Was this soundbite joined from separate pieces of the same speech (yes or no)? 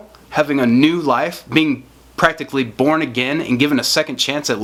no